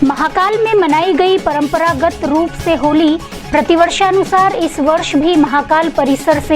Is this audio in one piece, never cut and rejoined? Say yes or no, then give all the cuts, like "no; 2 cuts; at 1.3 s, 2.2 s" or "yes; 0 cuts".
yes; 0 cuts